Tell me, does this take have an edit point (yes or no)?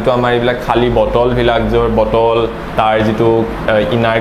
no